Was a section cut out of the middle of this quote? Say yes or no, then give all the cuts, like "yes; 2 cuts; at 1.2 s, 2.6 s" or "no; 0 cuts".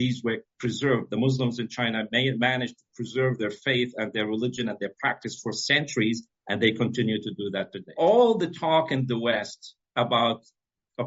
yes; 1 cut; at 7.8 s